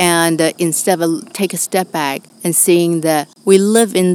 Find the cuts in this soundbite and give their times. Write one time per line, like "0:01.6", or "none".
0:02.3
0:03.3